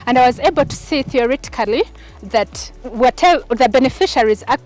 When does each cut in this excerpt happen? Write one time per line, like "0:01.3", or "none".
none